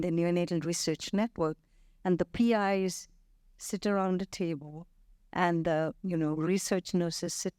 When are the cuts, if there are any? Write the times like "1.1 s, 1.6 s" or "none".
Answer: none